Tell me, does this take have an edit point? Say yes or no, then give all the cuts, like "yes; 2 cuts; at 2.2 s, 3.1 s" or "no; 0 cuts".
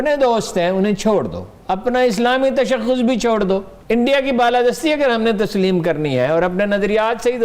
yes; 1 cut; at 3.7 s